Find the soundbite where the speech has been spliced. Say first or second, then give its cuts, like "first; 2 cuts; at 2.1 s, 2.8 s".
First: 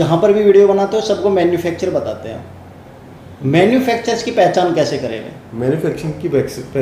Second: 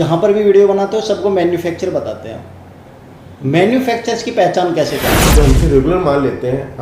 second; 1 cut; at 5.2 s